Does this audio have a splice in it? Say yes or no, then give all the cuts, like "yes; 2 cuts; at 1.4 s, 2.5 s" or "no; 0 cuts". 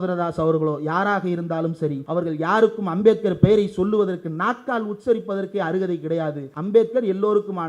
yes; 2 cuts; at 2.0 s, 6.5 s